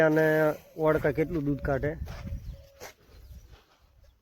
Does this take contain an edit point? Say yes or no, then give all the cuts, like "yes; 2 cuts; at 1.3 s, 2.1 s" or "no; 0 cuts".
no; 0 cuts